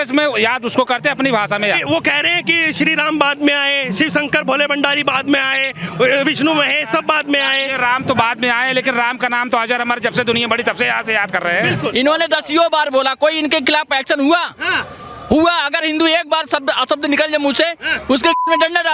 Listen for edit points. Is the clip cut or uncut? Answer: cut